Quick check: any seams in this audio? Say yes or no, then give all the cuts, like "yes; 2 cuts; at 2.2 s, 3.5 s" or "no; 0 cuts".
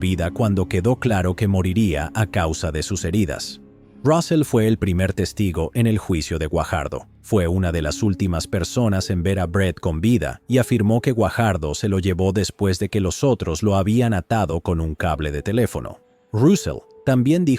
no; 0 cuts